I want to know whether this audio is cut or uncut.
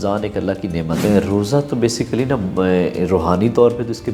cut